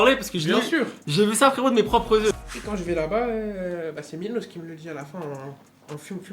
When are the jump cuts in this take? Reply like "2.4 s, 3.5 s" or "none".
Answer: 2.3 s